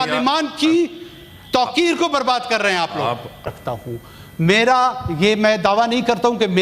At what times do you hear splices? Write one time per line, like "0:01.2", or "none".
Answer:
0:03.5